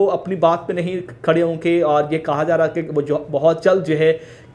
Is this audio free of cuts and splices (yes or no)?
yes